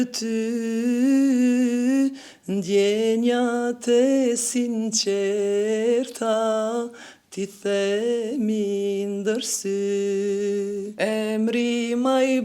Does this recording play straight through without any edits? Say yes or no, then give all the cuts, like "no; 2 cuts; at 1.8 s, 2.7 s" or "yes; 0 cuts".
no; 1 cut; at 10.9 s